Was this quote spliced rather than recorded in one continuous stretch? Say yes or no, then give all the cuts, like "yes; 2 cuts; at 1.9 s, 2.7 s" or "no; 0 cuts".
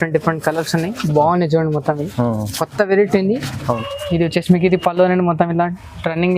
yes; 1 cut; at 3.5 s